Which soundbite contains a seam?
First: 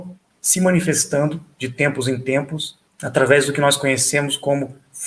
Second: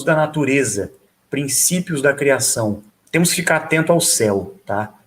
second; 1 cut; at 2.8 s

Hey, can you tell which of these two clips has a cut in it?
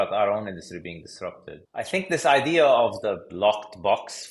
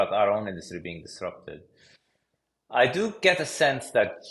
first; 1 cut; at 1.5 s

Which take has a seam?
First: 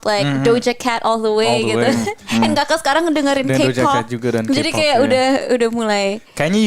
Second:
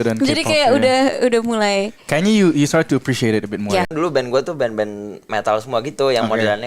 second; 1 cut; at 3.9 s

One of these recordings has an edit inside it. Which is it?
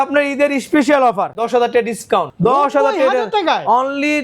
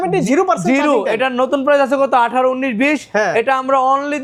first; 2 cuts; at 1.4 s, 2.3 s

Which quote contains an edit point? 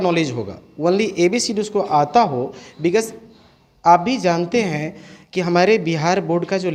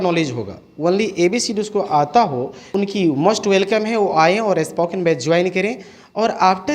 second; 1 cut; at 2.6 s

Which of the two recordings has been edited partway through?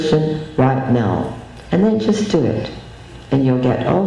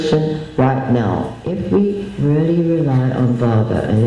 second; 1 cut; at 1.4 s

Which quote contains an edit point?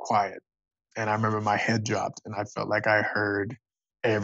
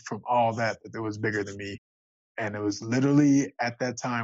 second; 1 cut; at 2.3 s

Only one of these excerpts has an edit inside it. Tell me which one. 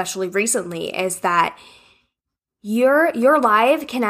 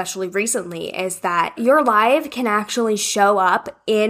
second; 1 cut; at 1.6 s

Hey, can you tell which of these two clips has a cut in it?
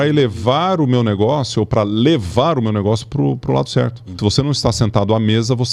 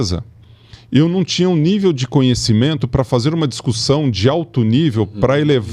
first; 1 cut; at 4.2 s

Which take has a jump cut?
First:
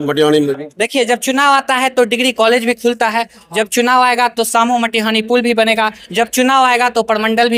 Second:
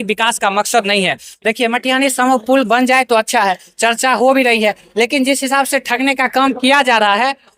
second; 1 cut; at 1.3 s

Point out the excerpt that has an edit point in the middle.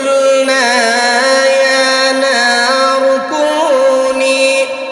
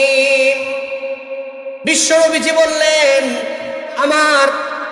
second; 1 cut; at 3.9 s

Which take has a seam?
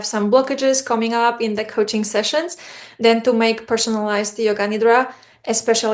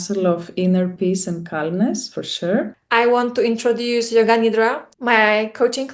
second; 2 cuts; at 2.7 s, 4.9 s

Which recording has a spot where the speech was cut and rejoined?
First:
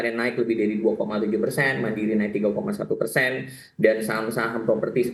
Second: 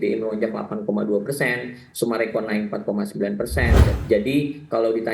second; 1 cut; at 3.8 s

